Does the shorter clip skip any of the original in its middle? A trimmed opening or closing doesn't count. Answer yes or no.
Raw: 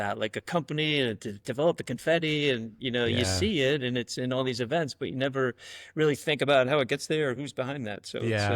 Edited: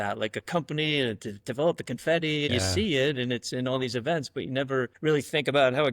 yes